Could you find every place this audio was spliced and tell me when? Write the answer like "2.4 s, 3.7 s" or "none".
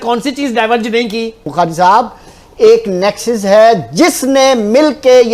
1.4 s

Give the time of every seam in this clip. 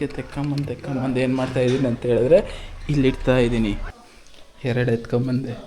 3.9 s

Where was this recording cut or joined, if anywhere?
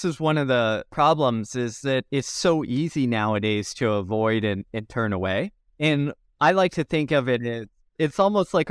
0.9 s, 6.2 s

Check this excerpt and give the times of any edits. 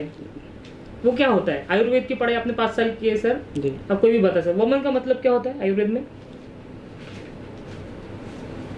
none

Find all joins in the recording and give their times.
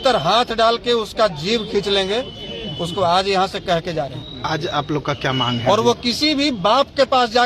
none

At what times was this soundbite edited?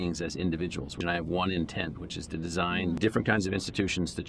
1.0 s, 3.0 s

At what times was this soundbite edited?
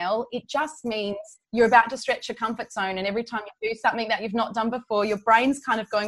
1.3 s

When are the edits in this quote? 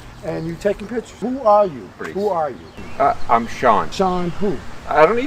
1.2 s, 2.0 s, 3.9 s

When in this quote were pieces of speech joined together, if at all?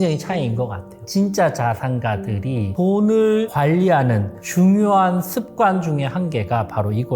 1.1 s, 2.7 s, 3.5 s

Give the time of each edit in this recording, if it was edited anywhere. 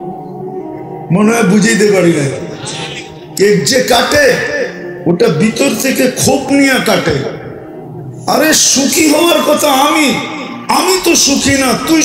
1.1 s

